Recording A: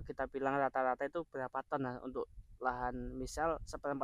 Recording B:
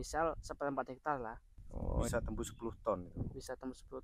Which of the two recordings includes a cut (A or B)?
B